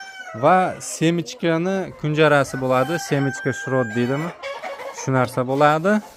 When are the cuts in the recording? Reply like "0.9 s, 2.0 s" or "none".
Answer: none